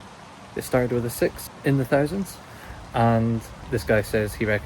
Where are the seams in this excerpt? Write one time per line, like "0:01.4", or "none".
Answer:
0:01.5
0:03.5